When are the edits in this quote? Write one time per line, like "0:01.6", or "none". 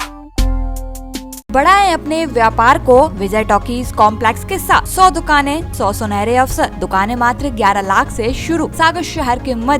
0:01.5
0:03.2
0:04.9
0:05.7
0:06.8
0:08.7